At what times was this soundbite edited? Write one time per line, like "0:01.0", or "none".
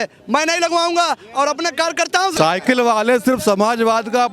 0:02.4